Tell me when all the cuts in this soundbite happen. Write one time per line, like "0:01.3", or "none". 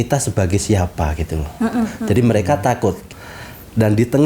0:03.1